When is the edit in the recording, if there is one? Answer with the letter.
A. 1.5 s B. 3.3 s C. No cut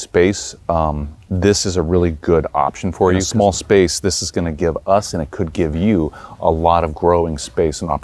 B